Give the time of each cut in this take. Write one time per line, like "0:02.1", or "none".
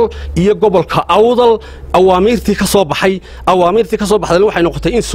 none